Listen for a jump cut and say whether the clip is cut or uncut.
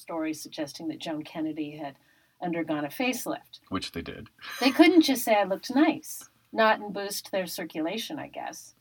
uncut